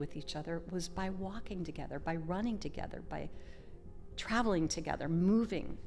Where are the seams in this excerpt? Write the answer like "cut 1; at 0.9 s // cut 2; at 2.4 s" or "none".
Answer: none